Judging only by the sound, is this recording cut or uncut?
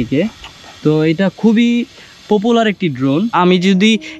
cut